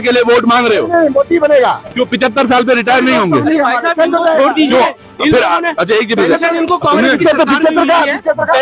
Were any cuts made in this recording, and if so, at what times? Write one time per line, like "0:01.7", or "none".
none